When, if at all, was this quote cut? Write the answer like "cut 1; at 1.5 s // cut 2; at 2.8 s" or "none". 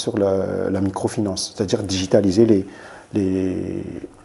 none